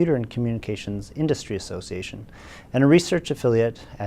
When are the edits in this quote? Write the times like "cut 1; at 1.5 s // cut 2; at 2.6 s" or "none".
cut 1; at 2.9 s